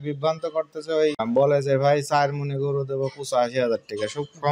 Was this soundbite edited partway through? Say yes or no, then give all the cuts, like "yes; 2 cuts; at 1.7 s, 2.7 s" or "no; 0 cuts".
yes; 1 cut; at 1.2 s